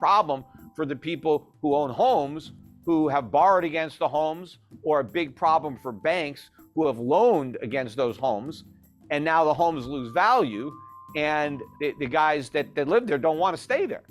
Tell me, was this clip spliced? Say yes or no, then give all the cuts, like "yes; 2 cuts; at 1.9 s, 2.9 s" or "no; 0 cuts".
yes; 1 cut; at 11.6 s